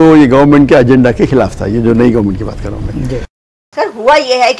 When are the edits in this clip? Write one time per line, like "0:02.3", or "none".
0:03.7